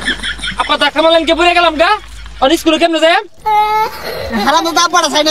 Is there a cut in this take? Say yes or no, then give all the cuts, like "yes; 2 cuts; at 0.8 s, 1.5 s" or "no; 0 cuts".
no; 0 cuts